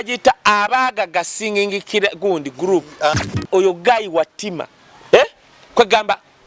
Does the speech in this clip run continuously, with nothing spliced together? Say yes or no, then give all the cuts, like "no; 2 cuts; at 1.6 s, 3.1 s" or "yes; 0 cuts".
no; 1 cut; at 3.4 s